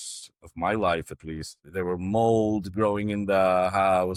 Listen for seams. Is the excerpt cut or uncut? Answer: uncut